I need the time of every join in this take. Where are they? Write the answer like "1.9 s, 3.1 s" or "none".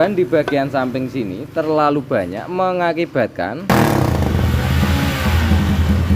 3.7 s

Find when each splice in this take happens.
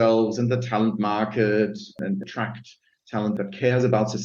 2.0 s, 3.3 s

